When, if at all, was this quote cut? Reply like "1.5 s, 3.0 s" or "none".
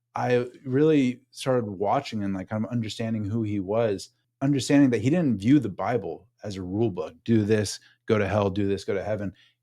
4.2 s